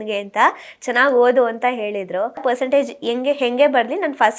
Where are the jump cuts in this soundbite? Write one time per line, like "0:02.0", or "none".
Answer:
0:02.4